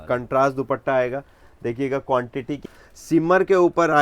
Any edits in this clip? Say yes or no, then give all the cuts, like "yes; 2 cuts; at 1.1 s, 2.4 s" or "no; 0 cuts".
yes; 1 cut; at 2.7 s